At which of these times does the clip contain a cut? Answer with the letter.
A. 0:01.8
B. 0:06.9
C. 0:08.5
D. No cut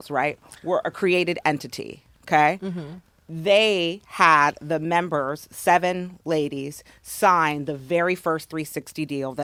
D